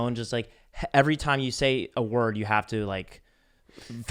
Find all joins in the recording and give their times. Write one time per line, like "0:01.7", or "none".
none